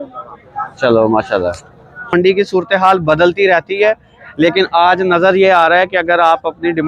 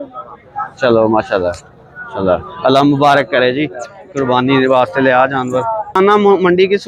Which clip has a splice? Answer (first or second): first